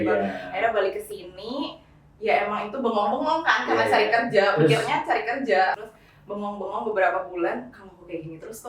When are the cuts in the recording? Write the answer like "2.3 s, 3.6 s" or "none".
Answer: 5.8 s

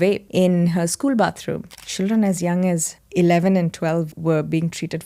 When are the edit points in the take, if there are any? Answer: 1.8 s

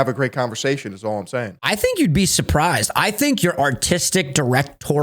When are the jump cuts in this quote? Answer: 1.6 s

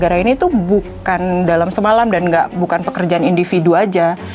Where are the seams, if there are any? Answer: none

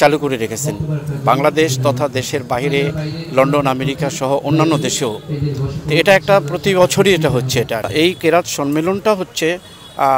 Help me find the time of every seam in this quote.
none

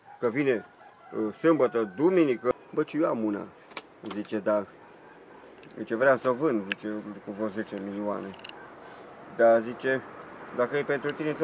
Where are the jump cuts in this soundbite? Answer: 2.5 s

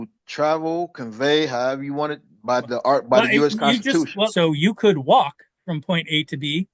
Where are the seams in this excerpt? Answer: 4.3 s

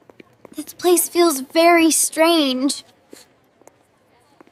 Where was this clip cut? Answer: none

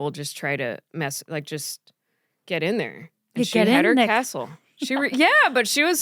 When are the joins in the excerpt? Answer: none

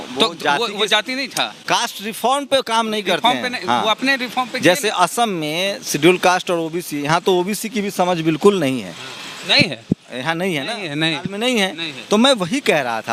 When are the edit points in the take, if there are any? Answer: none

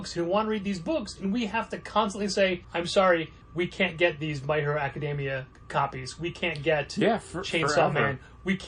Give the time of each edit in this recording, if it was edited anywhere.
2.7 s, 3.4 s, 5.6 s

